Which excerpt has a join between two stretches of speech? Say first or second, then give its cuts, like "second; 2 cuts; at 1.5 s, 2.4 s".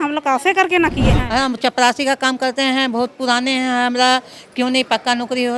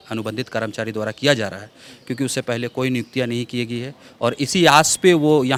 first; 1 cut; at 1.2 s